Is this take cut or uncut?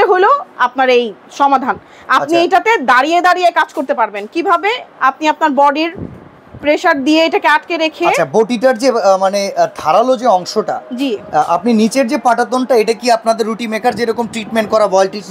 uncut